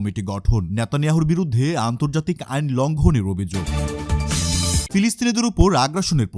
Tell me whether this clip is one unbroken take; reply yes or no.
no